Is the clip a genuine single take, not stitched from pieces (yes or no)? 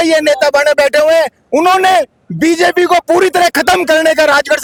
yes